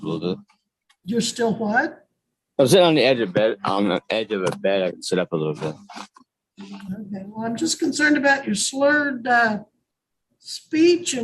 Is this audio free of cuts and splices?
yes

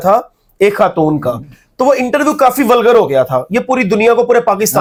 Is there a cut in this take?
no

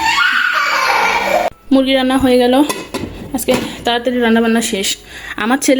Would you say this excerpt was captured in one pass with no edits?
no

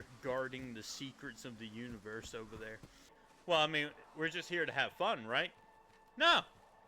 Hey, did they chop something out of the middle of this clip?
yes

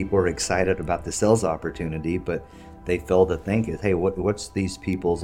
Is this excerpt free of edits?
yes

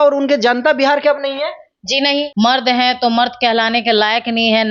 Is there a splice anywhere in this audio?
yes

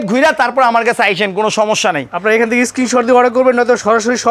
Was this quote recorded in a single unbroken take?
yes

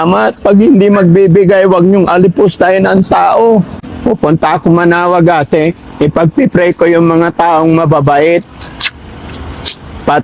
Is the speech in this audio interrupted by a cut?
yes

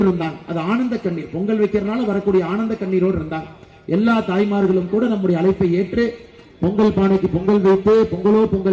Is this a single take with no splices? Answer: yes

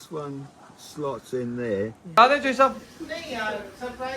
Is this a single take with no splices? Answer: no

